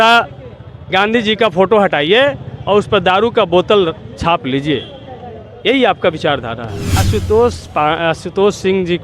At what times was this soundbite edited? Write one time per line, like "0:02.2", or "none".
0:07.0